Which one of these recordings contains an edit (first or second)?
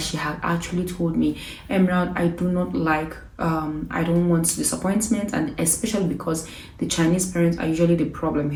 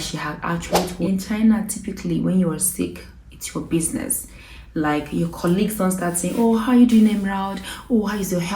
second